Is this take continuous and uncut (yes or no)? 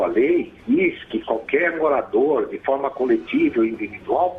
no